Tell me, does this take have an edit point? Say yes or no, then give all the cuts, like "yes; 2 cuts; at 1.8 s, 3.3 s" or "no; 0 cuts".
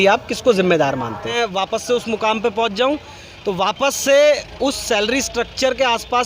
yes; 1 cut; at 1.3 s